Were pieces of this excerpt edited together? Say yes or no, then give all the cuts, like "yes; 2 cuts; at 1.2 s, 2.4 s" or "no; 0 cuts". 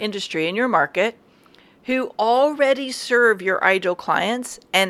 no; 0 cuts